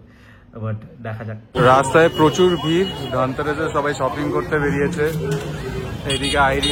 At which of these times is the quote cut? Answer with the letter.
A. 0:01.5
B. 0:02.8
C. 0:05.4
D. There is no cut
A